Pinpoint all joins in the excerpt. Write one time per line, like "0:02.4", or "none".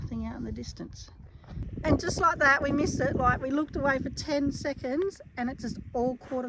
0:01.6